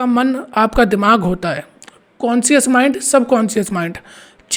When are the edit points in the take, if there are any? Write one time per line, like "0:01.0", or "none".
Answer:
none